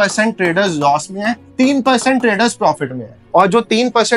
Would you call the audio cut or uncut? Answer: uncut